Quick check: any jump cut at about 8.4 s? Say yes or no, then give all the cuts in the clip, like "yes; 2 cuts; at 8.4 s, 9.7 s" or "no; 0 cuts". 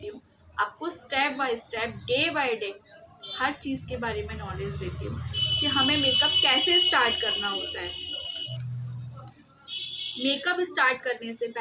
yes; 1 cut; at 8.4 s